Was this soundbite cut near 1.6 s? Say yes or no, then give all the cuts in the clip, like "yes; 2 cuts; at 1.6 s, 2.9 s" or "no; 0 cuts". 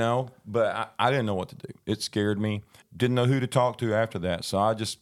no; 1 cut; at 2.8 s